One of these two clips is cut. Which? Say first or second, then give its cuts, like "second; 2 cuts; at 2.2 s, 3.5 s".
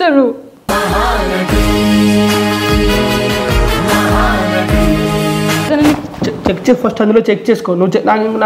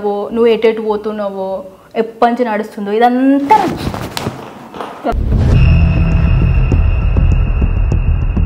first; 1 cut; at 5.6 s